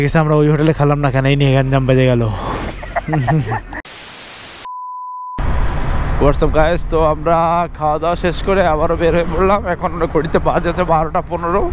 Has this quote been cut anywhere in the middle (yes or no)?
no